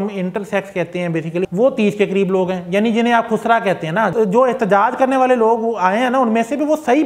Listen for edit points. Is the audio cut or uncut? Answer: cut